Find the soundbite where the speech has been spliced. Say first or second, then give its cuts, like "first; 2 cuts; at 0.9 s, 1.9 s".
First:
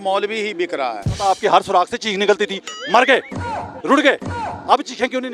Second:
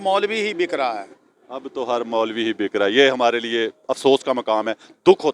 first; 1 cut; at 1.3 s